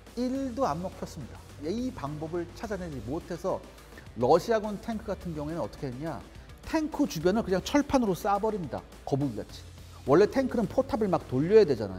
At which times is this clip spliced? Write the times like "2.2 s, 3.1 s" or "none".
1.5 s